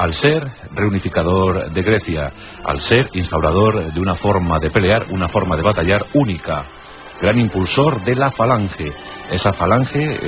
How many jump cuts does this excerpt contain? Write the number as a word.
zero